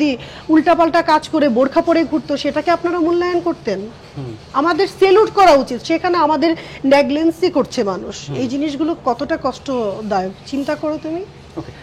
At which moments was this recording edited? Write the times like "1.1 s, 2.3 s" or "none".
none